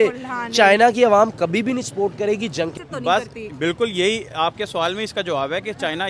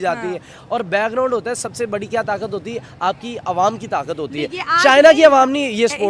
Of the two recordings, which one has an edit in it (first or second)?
first